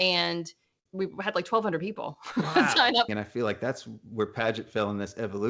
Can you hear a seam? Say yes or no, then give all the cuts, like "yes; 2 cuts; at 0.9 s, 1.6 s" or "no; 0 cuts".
yes; 1 cut; at 3.1 s